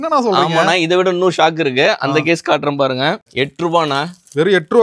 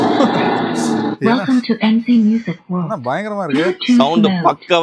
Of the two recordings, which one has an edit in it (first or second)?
first